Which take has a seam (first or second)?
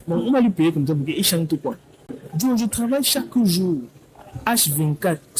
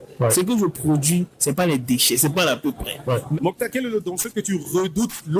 second